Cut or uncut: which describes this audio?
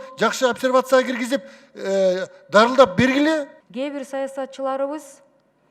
cut